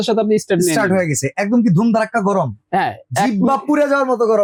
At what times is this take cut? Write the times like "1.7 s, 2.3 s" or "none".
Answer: none